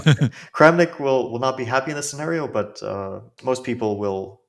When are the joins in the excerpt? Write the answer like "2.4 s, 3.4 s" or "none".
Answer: 3.3 s